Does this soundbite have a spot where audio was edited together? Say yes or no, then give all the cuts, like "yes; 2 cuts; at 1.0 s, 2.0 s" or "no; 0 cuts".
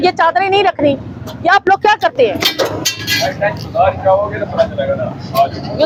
no; 0 cuts